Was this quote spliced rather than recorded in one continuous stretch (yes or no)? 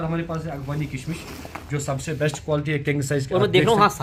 no